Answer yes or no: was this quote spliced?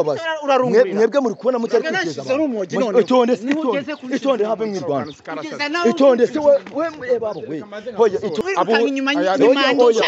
yes